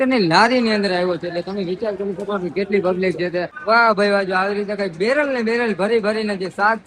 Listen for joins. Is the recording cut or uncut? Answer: cut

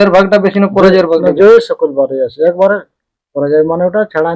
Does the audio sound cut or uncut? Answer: uncut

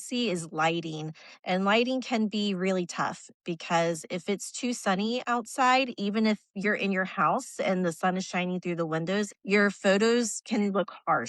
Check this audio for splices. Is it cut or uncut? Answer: cut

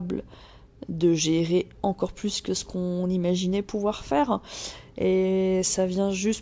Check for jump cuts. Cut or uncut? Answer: uncut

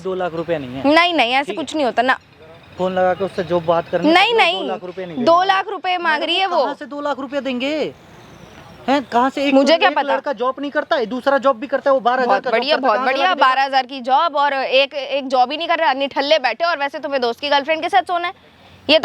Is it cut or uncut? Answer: uncut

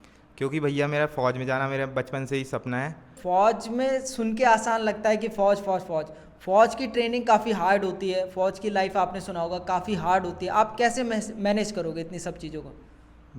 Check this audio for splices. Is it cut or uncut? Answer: cut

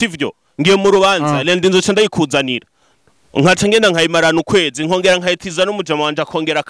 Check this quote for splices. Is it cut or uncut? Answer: uncut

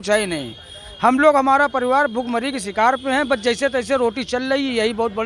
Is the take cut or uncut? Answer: uncut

